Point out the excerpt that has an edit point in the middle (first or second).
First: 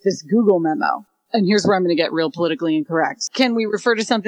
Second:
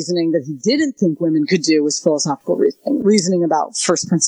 first